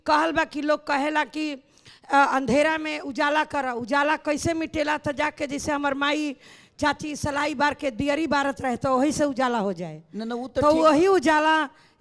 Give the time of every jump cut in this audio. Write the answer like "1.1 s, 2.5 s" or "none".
none